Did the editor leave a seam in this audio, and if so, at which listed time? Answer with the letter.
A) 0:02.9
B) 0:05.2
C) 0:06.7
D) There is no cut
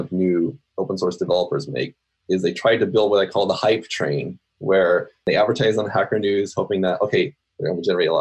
B